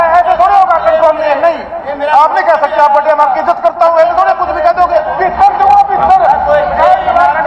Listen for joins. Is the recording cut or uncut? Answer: cut